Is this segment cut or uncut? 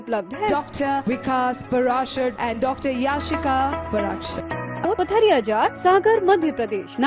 cut